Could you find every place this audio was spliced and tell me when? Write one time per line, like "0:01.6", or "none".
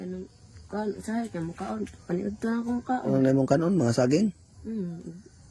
0:03.1